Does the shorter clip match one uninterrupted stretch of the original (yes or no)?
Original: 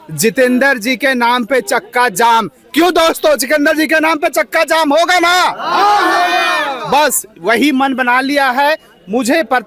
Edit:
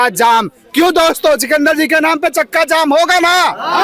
yes